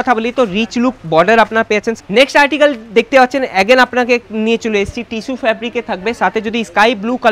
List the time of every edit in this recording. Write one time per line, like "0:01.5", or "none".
0:02.0